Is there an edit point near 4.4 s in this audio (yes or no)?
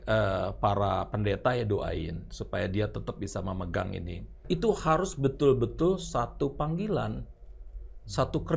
yes